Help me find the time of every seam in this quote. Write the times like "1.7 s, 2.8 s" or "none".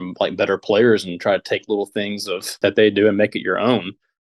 2.6 s